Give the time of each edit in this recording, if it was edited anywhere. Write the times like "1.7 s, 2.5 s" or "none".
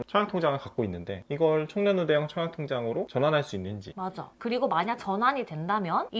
none